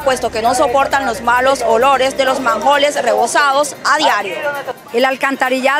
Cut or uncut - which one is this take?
cut